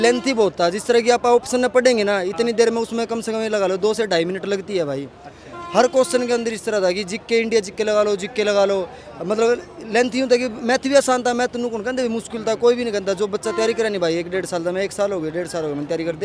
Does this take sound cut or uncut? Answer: uncut